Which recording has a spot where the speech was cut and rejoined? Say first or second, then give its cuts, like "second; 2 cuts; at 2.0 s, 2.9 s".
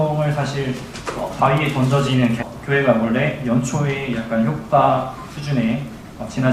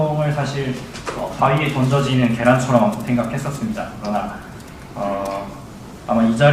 second; 1 cut; at 2.4 s